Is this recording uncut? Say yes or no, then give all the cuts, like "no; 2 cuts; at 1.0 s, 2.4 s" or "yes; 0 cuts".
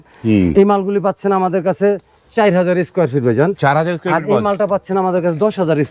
yes; 0 cuts